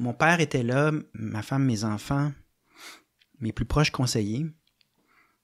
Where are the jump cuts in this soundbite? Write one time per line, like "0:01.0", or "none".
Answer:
0:01.1